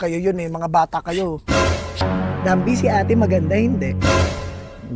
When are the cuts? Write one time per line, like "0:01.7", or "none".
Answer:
0:02.0